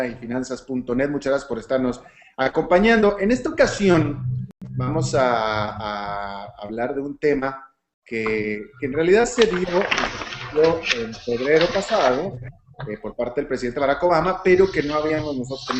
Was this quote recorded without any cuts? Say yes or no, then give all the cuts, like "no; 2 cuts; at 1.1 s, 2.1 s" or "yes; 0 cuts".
yes; 0 cuts